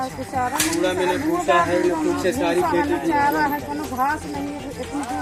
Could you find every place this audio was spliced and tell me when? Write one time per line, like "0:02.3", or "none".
none